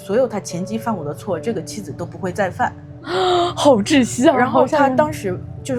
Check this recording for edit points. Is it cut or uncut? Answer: uncut